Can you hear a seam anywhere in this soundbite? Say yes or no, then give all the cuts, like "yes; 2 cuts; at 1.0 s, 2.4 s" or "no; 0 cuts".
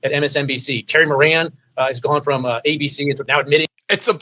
no; 0 cuts